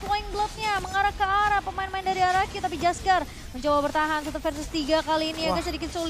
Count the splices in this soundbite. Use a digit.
0